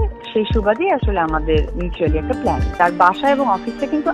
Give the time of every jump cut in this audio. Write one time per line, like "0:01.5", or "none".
0:02.7